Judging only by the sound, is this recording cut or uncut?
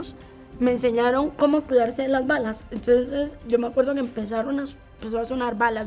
uncut